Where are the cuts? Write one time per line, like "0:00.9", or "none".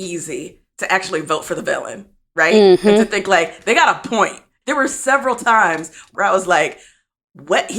0:04.6
0:06.1